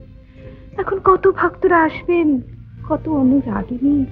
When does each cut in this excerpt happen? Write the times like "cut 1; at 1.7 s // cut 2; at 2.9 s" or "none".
none